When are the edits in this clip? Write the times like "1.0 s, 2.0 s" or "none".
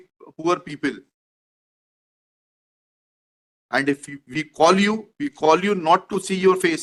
none